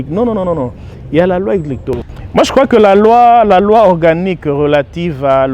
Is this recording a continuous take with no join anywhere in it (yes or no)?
no